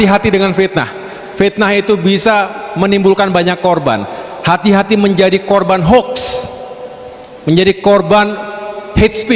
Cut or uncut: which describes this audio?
uncut